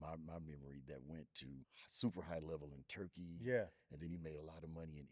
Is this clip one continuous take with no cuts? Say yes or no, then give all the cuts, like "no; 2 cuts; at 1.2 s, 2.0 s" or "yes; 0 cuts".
no; 1 cut; at 1.8 s